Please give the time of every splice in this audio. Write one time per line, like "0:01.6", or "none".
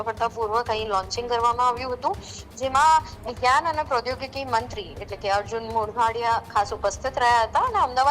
none